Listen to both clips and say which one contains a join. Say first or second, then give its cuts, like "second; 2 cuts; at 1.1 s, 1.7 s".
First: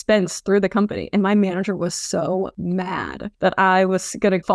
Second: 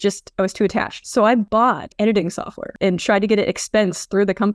second; 1 cut; at 2.7 s